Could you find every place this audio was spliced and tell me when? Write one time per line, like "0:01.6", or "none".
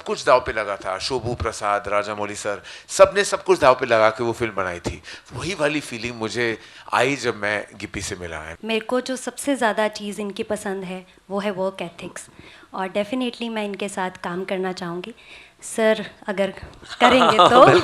0:08.5